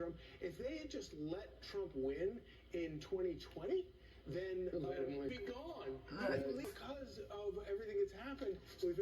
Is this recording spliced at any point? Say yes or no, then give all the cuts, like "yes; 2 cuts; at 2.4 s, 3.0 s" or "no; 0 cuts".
yes; 2 cuts; at 5.4 s, 6.6 s